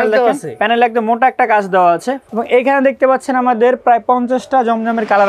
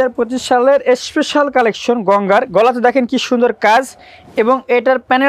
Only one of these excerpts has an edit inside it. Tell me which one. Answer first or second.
first